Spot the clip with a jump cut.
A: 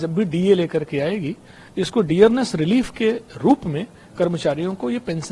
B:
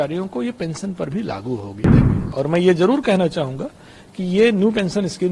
B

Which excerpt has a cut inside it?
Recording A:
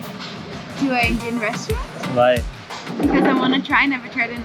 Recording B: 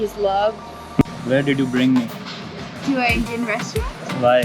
B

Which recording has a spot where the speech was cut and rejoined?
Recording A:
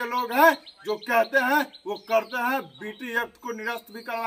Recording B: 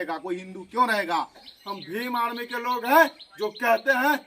B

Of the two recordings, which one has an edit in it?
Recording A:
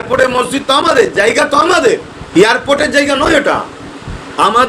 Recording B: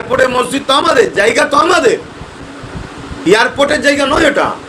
A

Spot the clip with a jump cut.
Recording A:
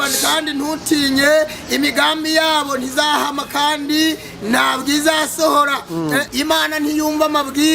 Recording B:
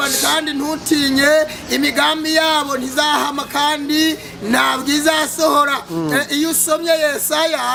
A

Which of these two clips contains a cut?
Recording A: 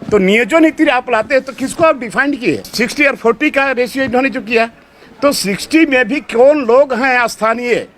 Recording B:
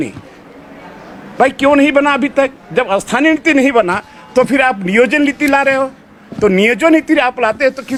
A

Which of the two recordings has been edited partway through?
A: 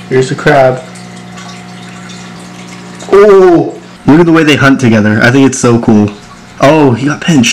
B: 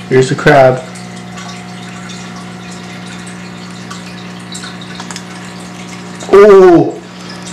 A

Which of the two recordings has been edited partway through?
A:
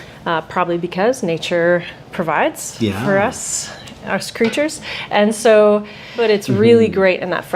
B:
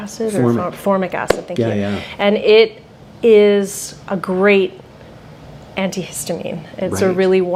A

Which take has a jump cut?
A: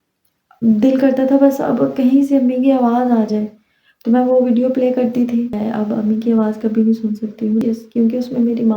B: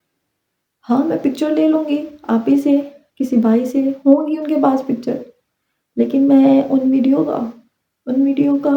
A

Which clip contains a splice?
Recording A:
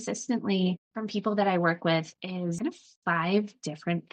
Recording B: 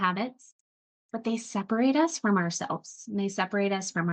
A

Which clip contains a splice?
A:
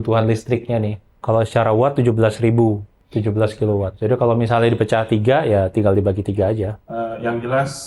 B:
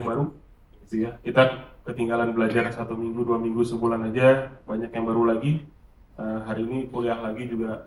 A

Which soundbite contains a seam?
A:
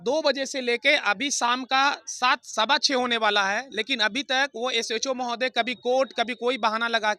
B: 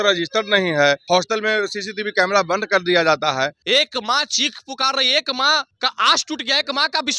B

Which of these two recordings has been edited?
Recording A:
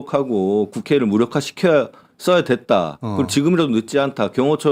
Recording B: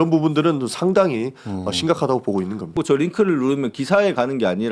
B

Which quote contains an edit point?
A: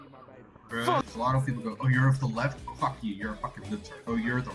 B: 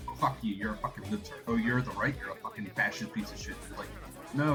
A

